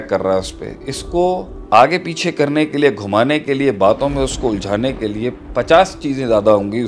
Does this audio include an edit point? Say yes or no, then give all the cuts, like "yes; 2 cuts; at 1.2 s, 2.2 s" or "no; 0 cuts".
no; 0 cuts